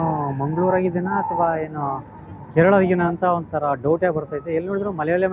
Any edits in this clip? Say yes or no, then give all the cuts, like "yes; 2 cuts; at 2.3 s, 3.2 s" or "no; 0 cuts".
no; 0 cuts